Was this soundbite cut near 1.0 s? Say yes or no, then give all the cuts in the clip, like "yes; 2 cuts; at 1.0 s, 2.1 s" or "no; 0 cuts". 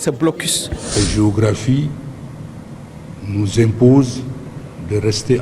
yes; 1 cut; at 1.0 s